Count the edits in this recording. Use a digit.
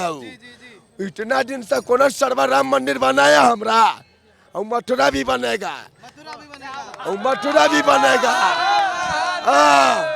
0